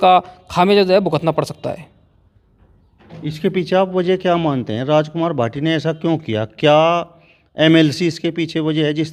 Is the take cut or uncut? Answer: uncut